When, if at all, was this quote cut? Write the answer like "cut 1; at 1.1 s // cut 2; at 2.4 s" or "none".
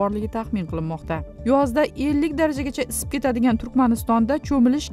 cut 1; at 1.3 s

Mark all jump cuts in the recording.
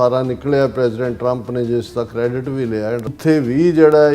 cut 1; at 3.0 s

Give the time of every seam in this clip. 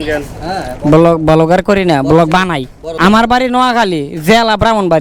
none

